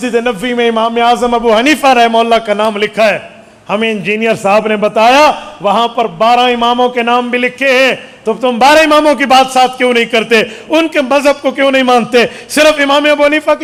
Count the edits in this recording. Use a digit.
0